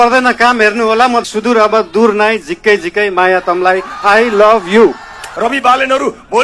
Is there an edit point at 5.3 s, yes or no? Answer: yes